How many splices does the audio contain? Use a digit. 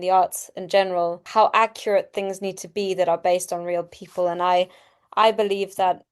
1